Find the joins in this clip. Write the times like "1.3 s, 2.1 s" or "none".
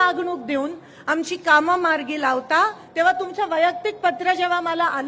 2.8 s